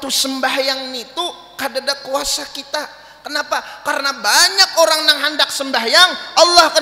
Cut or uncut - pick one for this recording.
uncut